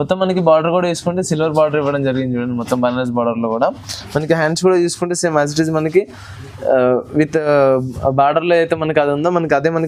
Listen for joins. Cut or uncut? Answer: uncut